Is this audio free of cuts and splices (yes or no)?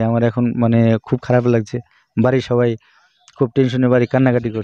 yes